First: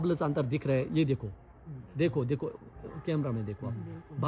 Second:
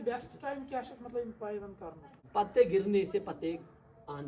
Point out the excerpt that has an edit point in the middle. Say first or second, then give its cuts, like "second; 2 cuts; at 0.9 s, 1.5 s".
second; 1 cut; at 2.2 s